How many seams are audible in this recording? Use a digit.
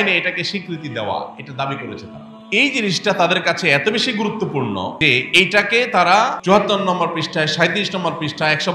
3